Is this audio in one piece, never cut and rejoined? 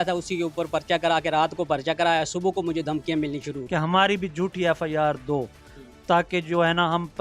no; 1 cut; at 3.6 s

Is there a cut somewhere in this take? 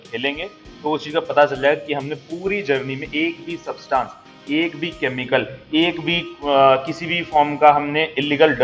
no; 0 cuts

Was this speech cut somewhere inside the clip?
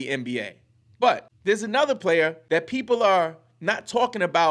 yes; 2 cuts; at 1.3 s, 2.4 s

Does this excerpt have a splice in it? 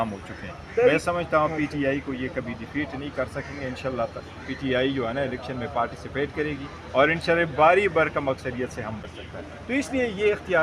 yes; 1 cut; at 9.0 s

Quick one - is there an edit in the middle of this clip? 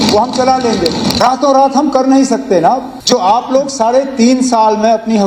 yes; 2 cuts; at 1.2 s, 2.9 s

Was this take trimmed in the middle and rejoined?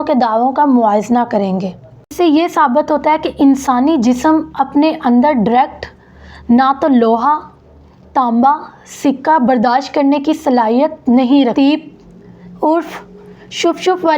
yes; 2 cuts; at 2.1 s, 11.5 s

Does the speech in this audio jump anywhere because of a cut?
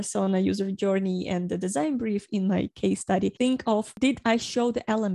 yes; 1 cut; at 3.3 s

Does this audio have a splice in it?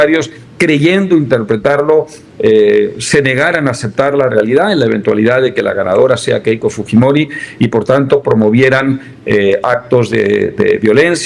no; 0 cuts

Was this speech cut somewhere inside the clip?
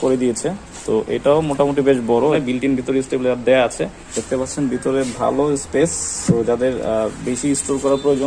yes; 3 cuts; at 2.4 s, 4.1 s, 6.1 s

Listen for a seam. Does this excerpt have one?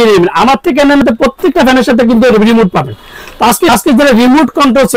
yes; 2 cuts; at 1.0 s, 3.7 s

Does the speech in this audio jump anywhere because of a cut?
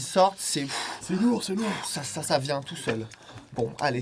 no; 0 cuts

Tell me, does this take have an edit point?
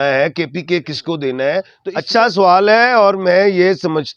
yes; 1 cut; at 1.8 s

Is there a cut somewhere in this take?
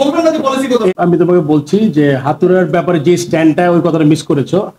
yes; 1 cut; at 0.9 s

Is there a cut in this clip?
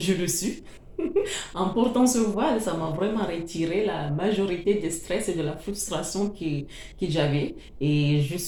no; 0 cuts

